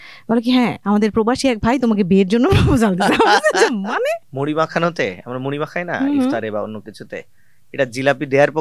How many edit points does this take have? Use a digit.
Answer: 1